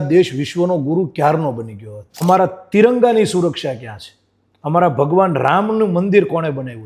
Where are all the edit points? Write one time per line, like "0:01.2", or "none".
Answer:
0:02.2